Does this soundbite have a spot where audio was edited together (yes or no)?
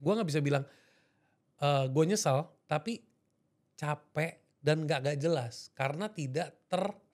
no